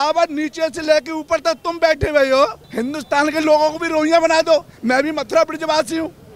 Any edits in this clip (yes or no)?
yes